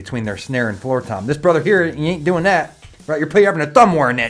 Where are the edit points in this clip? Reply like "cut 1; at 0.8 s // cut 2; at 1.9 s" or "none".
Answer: none